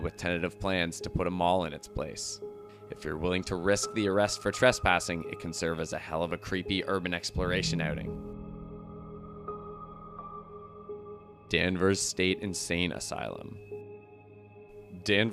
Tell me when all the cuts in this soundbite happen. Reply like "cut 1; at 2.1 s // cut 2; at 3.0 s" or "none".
cut 1; at 1.9 s